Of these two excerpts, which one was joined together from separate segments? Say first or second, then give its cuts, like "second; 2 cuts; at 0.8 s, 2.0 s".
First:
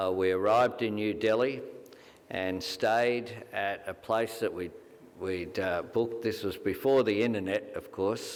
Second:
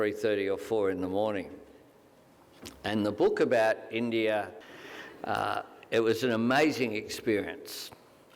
second; 1 cut; at 4.5 s